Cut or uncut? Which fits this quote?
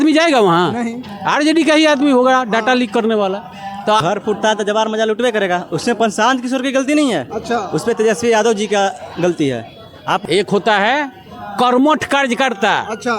cut